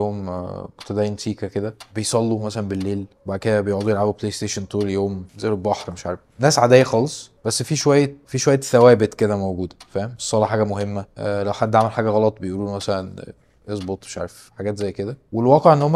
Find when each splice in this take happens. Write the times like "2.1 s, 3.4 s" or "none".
none